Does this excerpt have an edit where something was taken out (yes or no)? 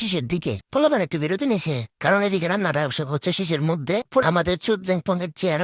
yes